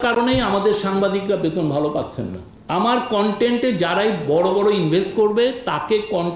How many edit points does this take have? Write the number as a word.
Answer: one